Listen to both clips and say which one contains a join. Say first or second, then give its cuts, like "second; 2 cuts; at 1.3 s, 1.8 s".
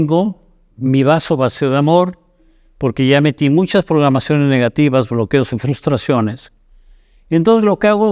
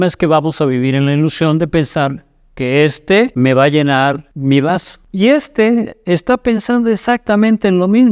second; 3 cuts; at 3.3 s, 4.3 s, 5.0 s